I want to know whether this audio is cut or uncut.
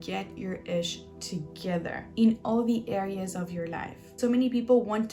cut